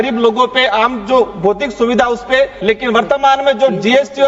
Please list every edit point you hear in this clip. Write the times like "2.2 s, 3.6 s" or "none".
2.6 s